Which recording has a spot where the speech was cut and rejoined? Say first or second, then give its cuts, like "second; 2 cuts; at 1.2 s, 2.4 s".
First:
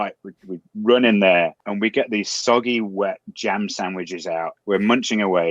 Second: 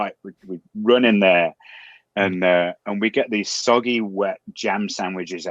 first; 2 cuts; at 1.6 s, 4.6 s